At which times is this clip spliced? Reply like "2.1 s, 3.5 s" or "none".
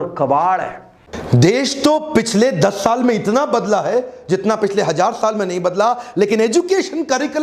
1.0 s